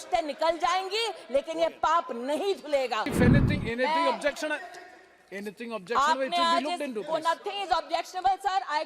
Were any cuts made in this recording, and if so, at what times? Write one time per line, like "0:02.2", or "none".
0:03.1